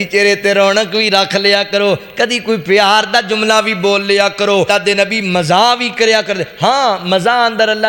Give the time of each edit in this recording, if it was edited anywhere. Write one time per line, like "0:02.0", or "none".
0:04.7